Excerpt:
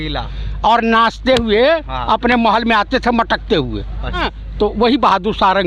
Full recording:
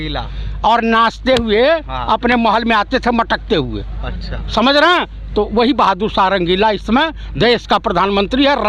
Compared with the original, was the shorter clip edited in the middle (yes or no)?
yes